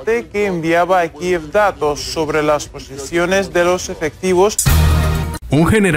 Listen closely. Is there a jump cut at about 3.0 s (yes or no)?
no